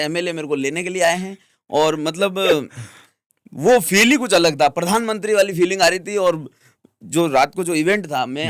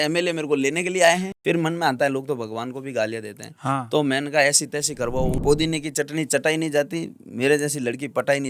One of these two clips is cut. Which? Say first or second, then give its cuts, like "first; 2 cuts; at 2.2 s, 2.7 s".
second; 2 cuts; at 1.3 s, 5.4 s